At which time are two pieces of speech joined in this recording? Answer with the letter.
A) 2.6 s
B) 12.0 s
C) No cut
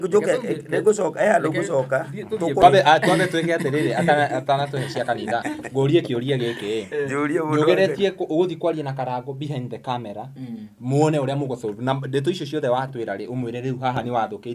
A